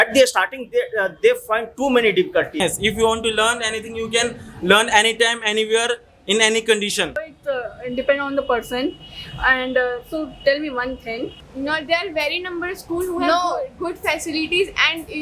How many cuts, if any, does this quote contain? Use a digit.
3